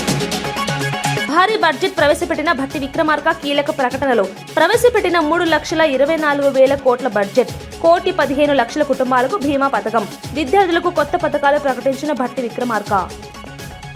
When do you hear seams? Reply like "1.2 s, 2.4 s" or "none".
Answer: 1.2 s